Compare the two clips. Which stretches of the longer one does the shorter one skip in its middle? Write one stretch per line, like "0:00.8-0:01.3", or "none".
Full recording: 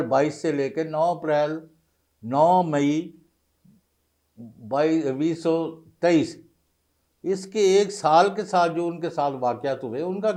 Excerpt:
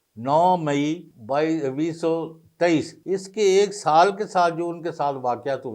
0:03.2-0:04.5
0:06.4-0:07.1